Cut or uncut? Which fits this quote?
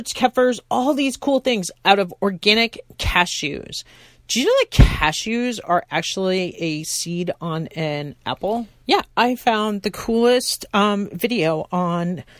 cut